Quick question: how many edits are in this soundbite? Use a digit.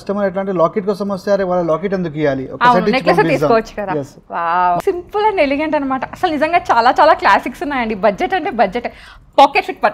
1